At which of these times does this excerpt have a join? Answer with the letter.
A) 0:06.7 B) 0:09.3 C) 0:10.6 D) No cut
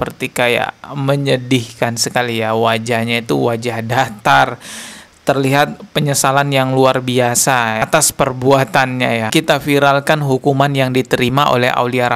B